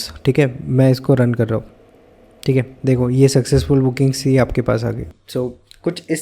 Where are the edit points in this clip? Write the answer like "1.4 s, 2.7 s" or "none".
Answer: 5.2 s